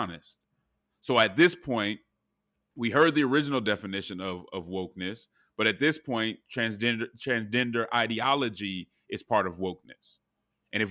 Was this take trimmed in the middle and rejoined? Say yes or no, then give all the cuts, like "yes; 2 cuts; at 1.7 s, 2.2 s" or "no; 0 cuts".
no; 0 cuts